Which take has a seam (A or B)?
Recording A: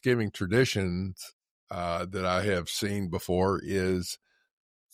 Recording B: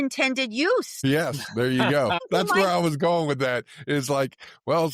B